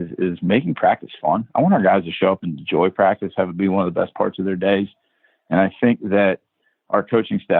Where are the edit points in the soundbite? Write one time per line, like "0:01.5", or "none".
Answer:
none